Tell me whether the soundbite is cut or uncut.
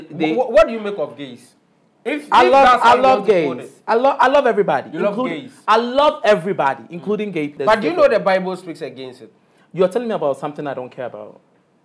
cut